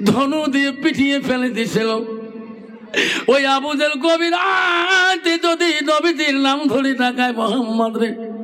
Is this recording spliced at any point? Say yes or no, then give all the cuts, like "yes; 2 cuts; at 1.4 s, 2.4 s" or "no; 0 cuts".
no; 0 cuts